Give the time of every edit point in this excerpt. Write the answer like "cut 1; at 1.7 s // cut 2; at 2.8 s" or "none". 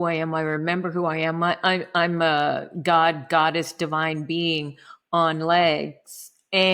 none